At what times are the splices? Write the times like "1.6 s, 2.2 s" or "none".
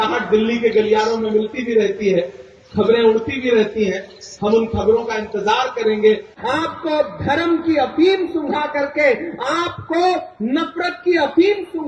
6.3 s

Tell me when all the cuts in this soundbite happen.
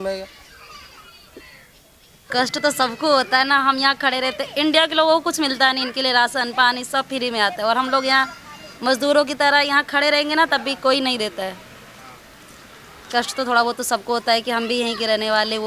2.3 s

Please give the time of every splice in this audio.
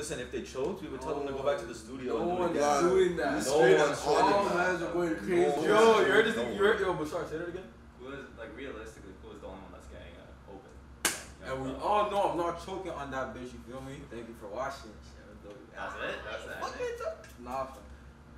none

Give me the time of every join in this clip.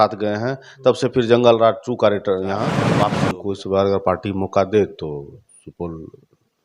2.9 s

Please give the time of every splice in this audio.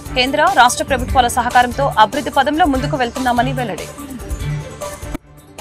3.8 s

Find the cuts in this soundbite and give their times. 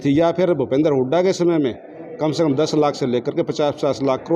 none

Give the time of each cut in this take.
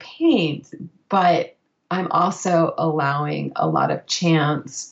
none

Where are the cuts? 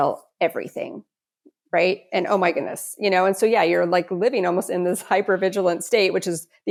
none

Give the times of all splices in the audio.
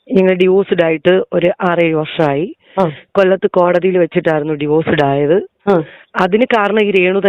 5.9 s

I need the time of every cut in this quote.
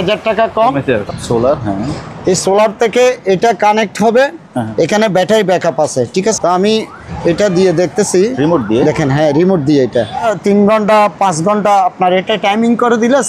1.0 s, 6.4 s, 10.3 s

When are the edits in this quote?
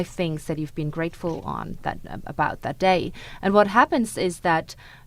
none

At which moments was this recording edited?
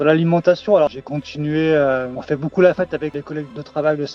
1.0 s, 3.2 s

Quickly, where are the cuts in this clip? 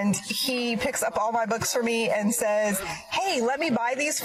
none

